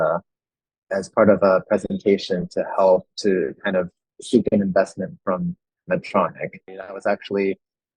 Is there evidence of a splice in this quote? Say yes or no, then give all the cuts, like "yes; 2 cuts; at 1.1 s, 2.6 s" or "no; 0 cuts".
yes; 1 cut; at 6.8 s